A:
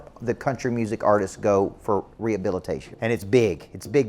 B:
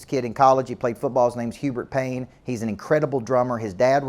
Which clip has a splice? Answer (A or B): A